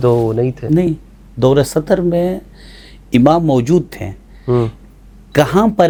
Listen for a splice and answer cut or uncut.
uncut